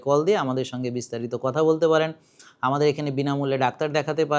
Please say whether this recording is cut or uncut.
uncut